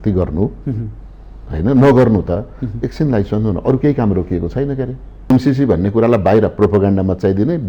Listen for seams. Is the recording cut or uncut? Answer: cut